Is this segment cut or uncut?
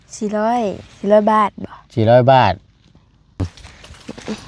cut